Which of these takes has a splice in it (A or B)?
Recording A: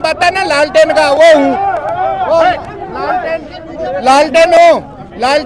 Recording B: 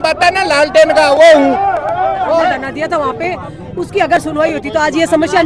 B